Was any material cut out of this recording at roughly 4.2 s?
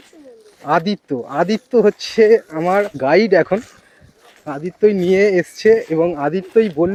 no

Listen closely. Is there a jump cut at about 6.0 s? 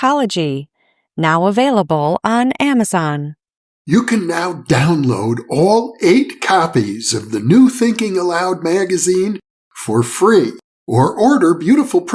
no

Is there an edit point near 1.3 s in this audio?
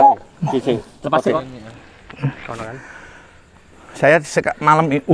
yes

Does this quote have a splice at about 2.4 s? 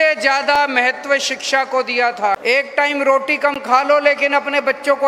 yes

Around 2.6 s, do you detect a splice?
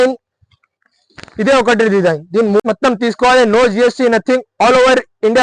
yes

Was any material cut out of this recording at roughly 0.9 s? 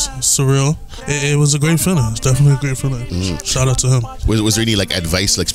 yes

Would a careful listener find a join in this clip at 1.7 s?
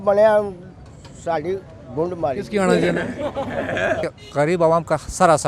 no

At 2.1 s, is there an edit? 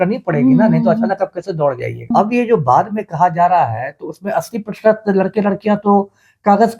yes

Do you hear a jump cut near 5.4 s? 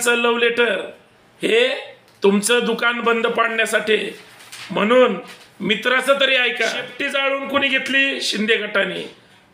no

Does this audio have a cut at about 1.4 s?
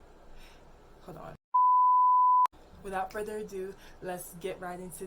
yes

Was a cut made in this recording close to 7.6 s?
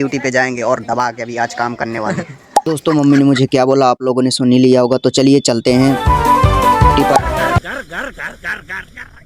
yes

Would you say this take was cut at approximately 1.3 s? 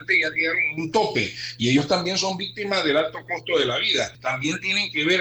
no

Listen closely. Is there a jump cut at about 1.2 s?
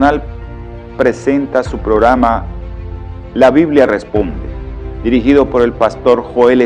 yes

